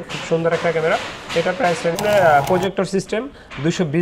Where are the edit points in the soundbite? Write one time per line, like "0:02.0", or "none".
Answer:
0:02.0